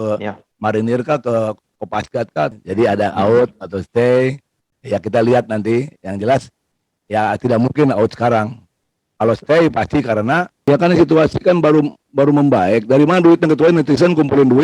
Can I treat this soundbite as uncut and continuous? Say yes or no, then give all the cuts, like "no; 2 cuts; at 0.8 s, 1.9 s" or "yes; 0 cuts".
no; 2 cuts; at 2.6 s, 10.6 s